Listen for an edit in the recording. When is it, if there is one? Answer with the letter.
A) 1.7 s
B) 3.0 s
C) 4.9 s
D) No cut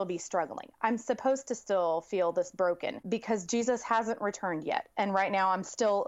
B